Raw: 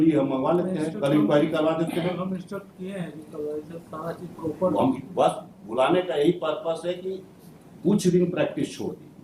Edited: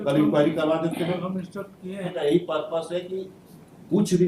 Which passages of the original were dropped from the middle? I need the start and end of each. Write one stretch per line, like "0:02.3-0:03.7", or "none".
0:03.1-0:06.1